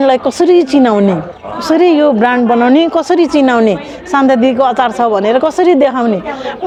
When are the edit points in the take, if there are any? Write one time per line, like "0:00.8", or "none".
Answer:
none